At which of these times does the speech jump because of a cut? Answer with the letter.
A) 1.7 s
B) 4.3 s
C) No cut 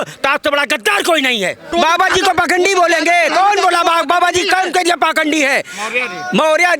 A